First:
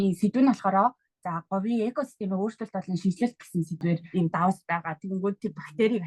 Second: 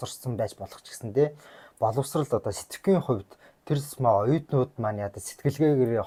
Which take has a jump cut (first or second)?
first